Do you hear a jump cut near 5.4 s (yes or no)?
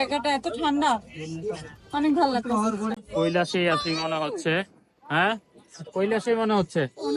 no